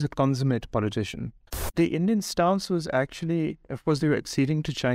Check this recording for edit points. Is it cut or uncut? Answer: cut